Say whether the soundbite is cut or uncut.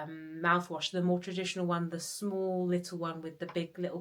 uncut